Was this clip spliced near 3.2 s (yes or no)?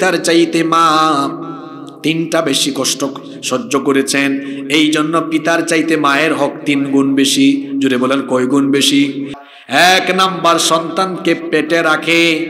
no